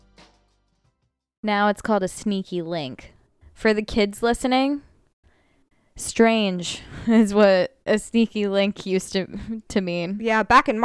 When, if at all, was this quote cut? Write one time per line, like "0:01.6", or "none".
0:01.4